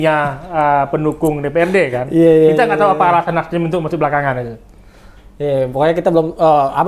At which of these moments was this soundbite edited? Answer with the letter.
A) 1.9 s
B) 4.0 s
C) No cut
C